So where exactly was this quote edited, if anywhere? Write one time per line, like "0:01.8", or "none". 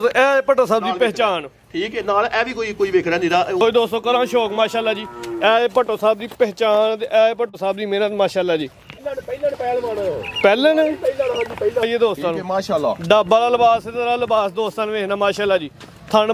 0:03.6
0:08.9
0:11.8